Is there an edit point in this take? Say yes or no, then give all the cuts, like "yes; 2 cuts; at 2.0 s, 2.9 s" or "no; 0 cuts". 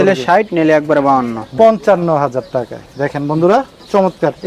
yes; 1 cut; at 1.4 s